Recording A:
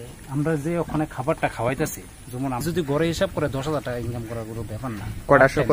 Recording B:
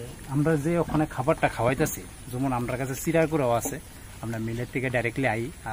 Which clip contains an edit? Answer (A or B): A